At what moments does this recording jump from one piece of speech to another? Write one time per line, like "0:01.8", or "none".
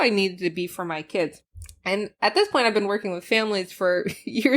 0:01.8